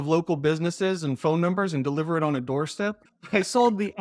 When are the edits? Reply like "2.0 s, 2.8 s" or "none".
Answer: 3.0 s

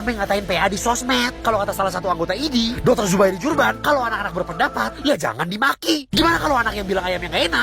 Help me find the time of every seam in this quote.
none

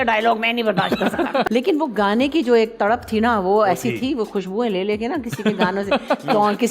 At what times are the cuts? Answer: 1.5 s

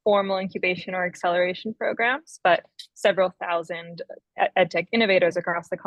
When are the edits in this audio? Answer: none

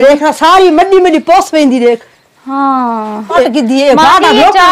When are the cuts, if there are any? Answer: 3.4 s

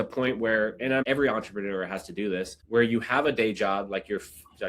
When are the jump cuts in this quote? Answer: 1.0 s, 2.6 s

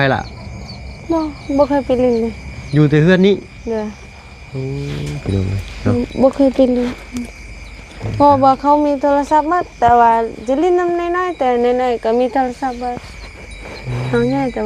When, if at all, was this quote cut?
none

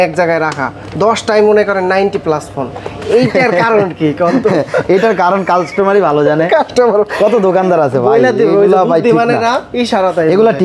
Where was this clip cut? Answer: none

